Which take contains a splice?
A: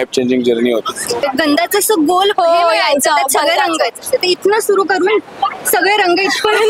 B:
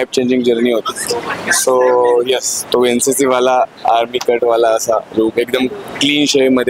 A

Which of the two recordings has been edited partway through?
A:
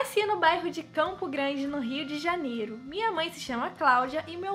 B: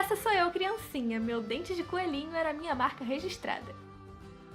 B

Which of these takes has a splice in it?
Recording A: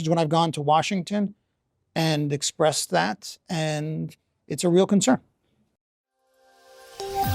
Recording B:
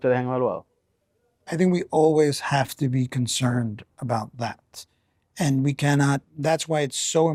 A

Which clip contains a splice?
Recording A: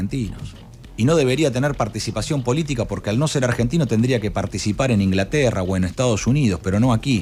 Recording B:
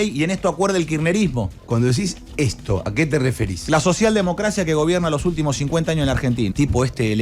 B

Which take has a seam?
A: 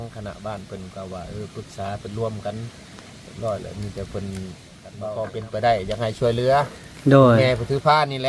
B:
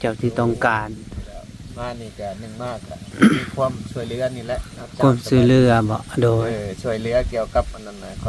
A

